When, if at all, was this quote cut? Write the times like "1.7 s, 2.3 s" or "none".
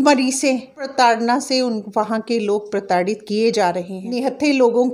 0.9 s, 4.0 s